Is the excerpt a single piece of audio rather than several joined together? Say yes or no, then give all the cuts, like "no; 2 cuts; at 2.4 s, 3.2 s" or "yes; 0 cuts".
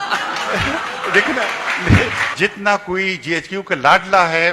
no; 1 cut; at 2.3 s